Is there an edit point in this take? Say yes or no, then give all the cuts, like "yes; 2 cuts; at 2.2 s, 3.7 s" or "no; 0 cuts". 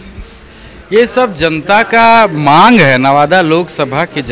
no; 0 cuts